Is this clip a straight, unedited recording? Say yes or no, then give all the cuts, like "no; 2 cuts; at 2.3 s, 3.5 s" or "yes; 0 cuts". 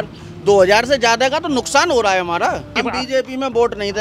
no; 1 cut; at 2.7 s